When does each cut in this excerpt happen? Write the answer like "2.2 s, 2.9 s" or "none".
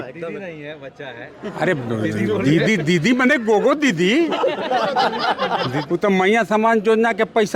5.8 s